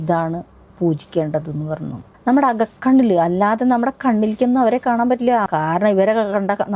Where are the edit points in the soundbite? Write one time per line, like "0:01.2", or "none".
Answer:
0:02.0
0:05.5